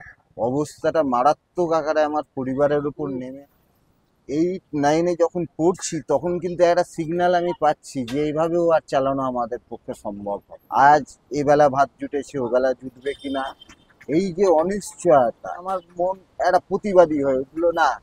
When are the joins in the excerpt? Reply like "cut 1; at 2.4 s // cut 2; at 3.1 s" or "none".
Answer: cut 1; at 3.2 s // cut 2; at 10.5 s // cut 3; at 15.9 s